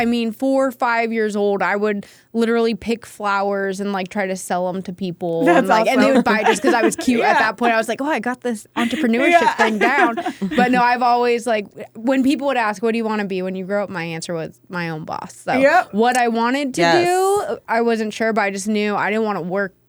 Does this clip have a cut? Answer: no; 0 cuts

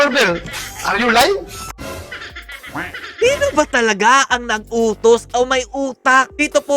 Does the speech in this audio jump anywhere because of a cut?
no; 0 cuts

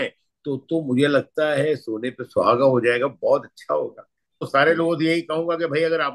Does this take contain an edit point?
yes; 1 cut; at 4.5 s

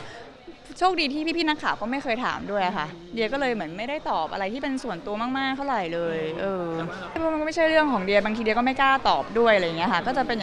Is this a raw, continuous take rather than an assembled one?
no; 1 cut; at 7.2 s

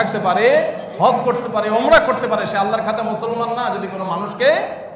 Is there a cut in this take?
no; 0 cuts

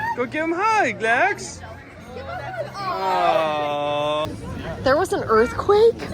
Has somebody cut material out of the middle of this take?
yes; 1 cut; at 4.2 s

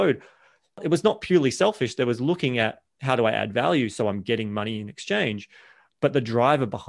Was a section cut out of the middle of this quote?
no; 0 cuts

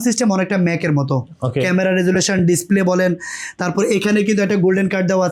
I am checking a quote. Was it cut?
no; 0 cuts

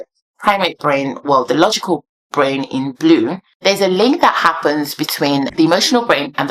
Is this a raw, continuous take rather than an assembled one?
no; 2 cuts; at 3.5 s, 5.5 s

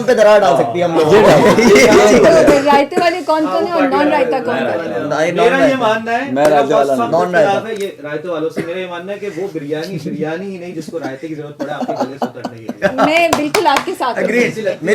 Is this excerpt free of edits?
yes; 0 cuts

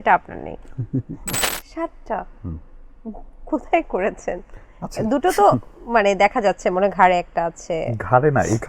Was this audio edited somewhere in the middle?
yes; 1 cut; at 1.5 s

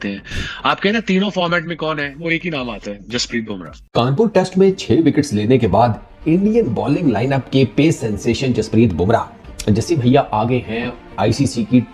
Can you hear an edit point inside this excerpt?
yes; 1 cut; at 3.8 s

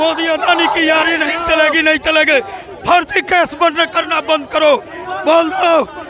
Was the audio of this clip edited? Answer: no; 0 cuts

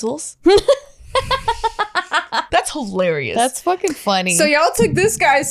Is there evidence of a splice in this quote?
yes; 1 cut; at 2.4 s

